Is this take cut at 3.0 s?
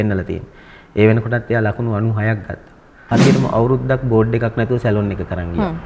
yes; 1 cut; at 3.0 s

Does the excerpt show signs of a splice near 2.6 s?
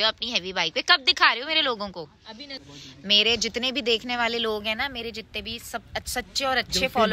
yes; 1 cut; at 2.6 s

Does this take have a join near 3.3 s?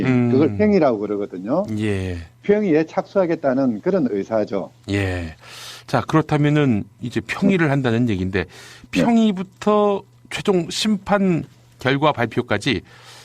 yes; 1 cut; at 3.3 s

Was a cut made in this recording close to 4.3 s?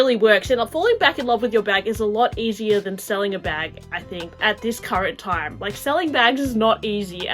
yes; 1 cut; at 4.3 s

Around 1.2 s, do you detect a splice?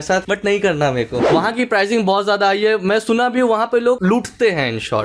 yes; 1 cut; at 1.2 s

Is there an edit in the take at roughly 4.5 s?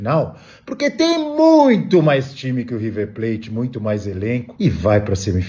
yes; 1 cut; at 4.5 s

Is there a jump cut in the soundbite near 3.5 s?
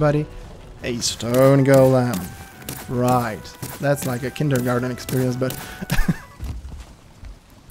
no; 1 cut; at 6.3 s

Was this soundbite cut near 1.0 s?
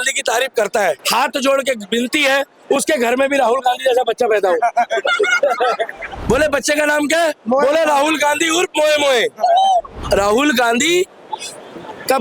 yes; 3 cuts; at 1.0 s, 6.1 s, 10.0 s

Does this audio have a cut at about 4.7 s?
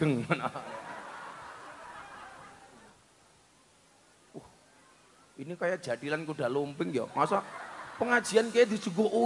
no; 1 cut; at 2.9 s

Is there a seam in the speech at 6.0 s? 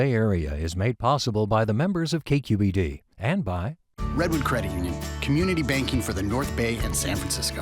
no; 1 cut; at 3.8 s

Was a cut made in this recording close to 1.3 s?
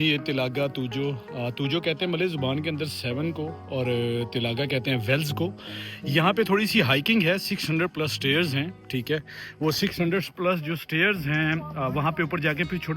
no; 0 cuts

